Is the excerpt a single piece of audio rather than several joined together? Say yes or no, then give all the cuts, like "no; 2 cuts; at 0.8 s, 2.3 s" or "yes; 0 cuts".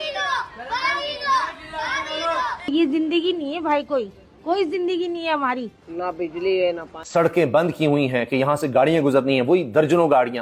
yes; 0 cuts